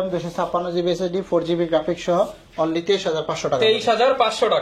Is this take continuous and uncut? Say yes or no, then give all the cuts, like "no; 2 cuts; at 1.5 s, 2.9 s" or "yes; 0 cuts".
yes; 0 cuts